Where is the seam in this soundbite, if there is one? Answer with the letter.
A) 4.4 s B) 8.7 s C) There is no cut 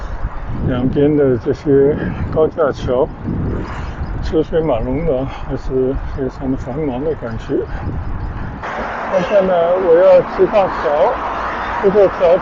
B